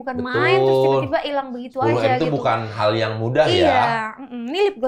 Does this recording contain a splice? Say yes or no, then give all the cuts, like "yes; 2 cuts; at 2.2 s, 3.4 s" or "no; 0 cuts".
no; 0 cuts